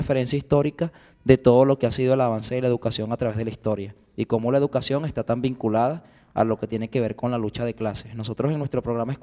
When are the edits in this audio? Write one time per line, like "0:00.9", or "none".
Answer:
0:03.6

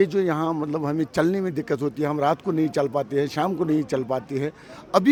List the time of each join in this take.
none

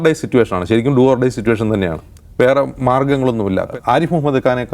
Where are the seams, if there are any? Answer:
0:03.7

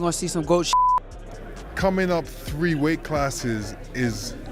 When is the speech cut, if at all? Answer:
0:01.2

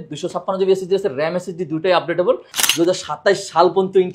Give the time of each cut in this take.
0:02.6

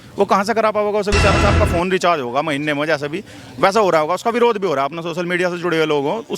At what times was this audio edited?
0:01.4

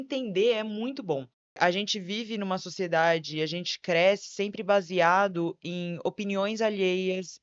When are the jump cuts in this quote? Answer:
0:01.6

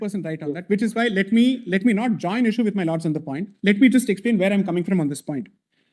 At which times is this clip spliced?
none

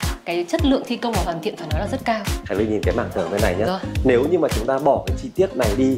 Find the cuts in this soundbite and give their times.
0:02.3

